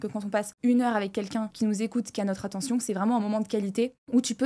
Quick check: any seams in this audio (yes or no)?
no